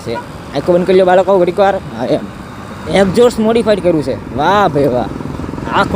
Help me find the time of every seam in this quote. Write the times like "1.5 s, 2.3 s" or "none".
2.7 s